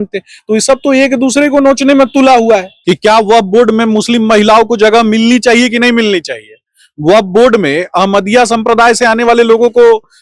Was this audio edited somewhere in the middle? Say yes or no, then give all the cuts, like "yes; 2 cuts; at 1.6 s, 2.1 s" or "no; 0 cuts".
yes; 1 cut; at 2.7 s